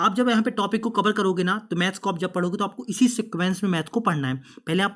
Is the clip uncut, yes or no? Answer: yes